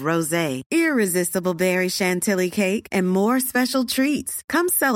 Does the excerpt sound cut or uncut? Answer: uncut